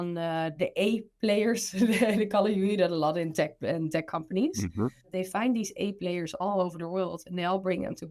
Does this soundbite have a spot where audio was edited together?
yes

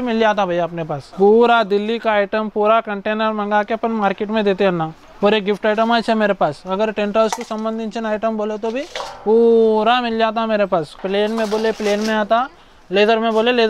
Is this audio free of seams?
no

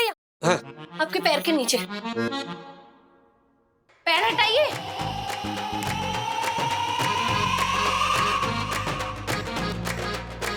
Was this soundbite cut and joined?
no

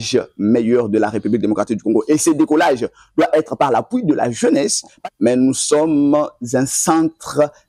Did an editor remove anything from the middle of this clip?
yes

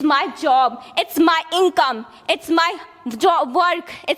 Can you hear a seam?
no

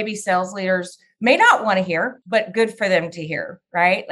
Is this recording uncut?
no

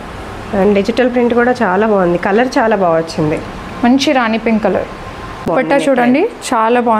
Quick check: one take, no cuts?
no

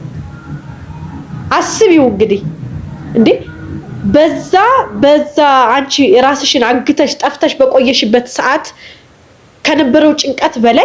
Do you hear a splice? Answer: no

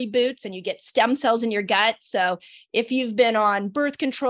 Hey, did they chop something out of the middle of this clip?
no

